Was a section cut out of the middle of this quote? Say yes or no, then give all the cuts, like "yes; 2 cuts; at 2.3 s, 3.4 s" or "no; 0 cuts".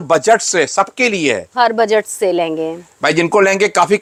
no; 0 cuts